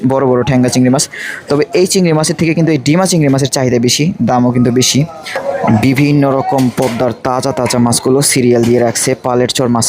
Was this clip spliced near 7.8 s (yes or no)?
no